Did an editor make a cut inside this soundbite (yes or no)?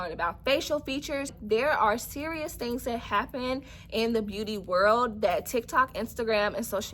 yes